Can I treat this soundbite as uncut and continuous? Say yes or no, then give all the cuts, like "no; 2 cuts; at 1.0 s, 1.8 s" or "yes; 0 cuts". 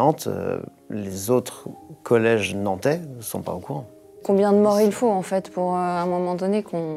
no; 1 cut; at 4.1 s